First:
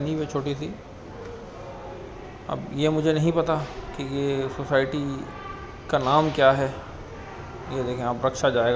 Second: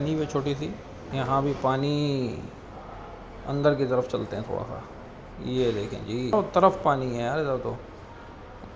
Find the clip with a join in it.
second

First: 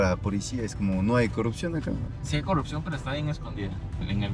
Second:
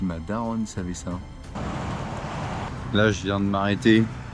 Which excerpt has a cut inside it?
second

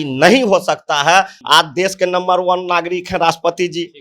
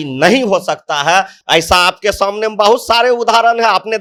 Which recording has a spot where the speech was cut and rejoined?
first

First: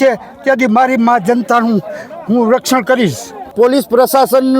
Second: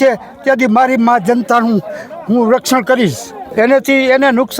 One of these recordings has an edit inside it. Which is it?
first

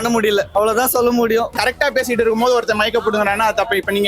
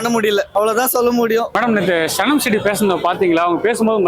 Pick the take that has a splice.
first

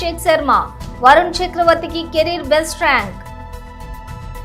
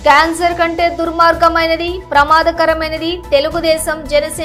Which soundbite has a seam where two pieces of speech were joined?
first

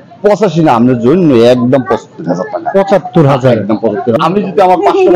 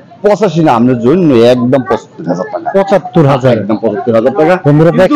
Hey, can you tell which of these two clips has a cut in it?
first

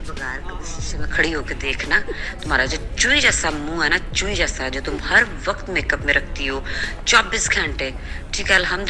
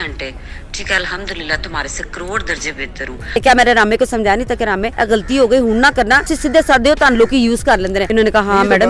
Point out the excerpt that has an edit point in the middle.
second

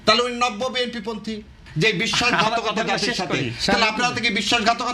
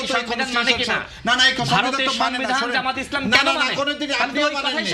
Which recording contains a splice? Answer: first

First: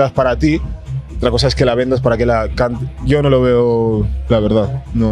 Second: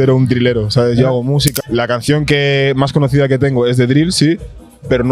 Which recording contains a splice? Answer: second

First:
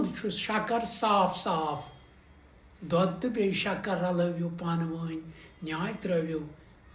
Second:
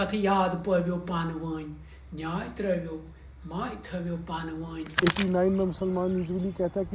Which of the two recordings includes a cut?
second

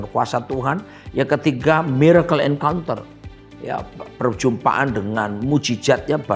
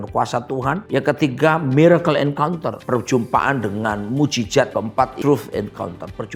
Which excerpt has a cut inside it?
second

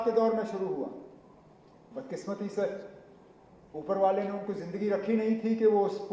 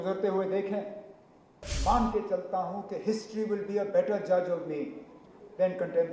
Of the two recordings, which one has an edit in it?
second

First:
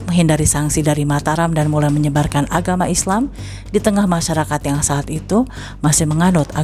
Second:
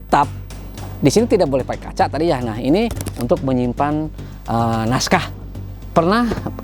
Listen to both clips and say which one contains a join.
second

